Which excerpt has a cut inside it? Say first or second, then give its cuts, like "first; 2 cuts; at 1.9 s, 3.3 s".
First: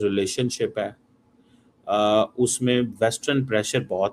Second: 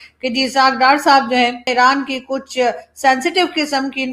second; 1 cut; at 1.7 s